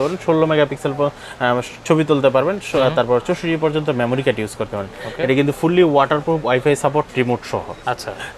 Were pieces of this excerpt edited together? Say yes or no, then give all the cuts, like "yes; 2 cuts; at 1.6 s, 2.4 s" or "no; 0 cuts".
no; 0 cuts